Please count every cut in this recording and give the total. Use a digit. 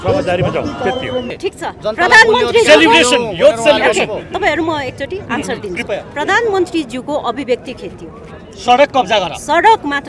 1